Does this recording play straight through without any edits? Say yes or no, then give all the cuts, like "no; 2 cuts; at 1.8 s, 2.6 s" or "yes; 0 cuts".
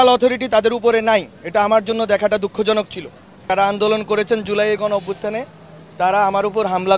no; 1 cut; at 3.5 s